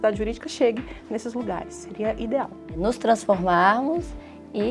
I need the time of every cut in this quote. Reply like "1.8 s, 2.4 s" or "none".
2.7 s